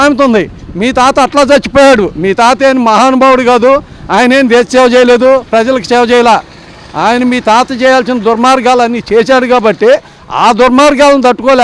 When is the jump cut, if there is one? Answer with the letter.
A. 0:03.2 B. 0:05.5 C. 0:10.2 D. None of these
D